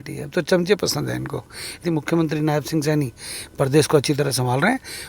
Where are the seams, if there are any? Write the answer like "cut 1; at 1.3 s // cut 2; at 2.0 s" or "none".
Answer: cut 1; at 1.9 s